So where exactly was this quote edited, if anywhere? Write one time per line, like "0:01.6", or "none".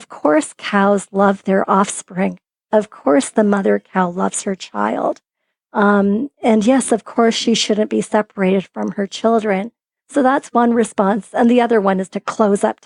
none